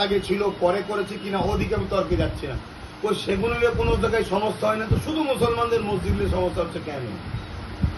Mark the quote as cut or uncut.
uncut